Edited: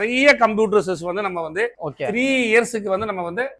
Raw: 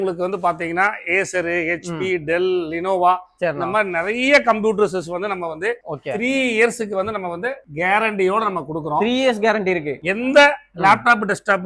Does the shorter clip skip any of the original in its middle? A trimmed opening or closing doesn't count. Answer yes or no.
no